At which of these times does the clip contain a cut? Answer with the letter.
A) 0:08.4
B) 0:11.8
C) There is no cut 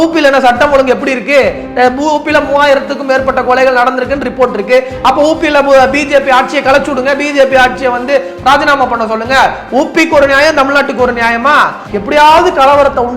B